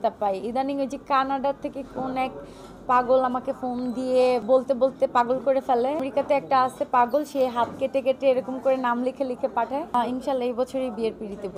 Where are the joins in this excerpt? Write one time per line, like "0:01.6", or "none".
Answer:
0:04.4
0:06.1
0:09.9